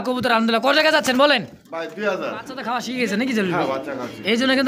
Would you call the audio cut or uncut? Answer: cut